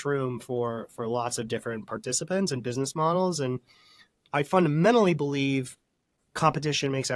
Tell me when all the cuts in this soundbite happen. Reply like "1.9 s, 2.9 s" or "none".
none